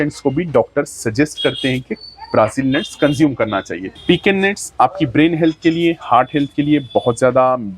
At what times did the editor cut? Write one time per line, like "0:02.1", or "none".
0:03.9